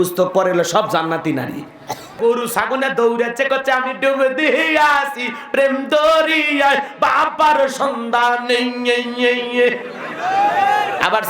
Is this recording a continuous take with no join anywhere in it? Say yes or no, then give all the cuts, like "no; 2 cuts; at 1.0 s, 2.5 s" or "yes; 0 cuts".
no; 1 cut; at 2.2 s